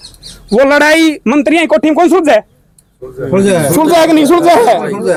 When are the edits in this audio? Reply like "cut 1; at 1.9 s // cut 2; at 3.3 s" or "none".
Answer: none